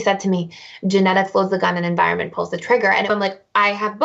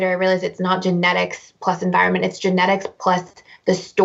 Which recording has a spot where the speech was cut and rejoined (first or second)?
first